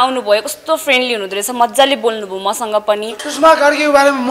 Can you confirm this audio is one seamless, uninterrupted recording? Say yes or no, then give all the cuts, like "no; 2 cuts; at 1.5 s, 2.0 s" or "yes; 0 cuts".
no; 1 cut; at 3.2 s